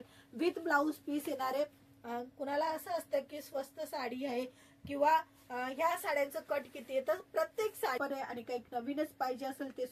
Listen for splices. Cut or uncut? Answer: cut